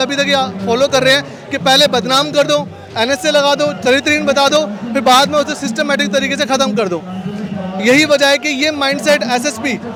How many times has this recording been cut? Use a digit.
0